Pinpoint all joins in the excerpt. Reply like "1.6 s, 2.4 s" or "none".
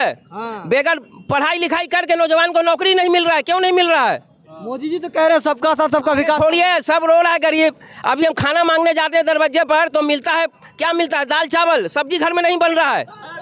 none